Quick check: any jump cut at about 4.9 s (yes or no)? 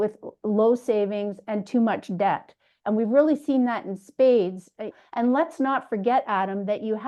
yes